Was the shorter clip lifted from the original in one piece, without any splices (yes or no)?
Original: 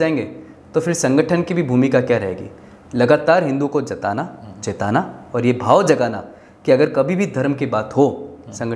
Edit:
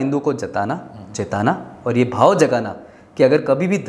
yes